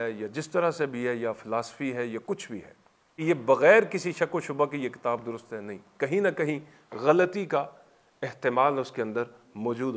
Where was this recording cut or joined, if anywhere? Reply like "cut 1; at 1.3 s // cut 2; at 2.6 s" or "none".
cut 1; at 2.9 s